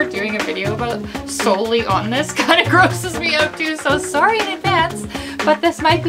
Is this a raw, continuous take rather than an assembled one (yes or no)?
yes